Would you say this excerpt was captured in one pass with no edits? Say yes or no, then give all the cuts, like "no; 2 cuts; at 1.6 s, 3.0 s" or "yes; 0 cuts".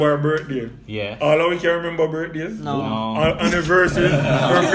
yes; 0 cuts